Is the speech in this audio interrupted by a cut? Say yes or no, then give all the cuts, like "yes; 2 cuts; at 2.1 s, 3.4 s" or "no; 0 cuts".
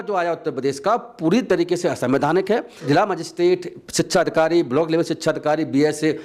yes; 1 cut; at 2.9 s